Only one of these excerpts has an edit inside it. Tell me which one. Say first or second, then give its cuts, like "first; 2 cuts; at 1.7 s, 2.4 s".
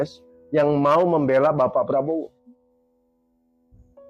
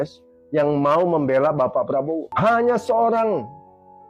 second; 1 cut; at 2.3 s